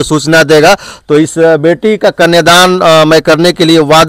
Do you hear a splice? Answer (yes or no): no